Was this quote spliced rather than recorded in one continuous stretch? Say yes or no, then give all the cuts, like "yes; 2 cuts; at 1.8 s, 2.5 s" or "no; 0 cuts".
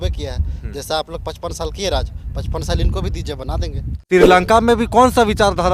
yes; 1 cut; at 3.9 s